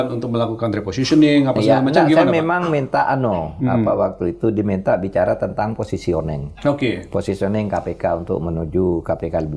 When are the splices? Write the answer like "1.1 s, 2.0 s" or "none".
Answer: none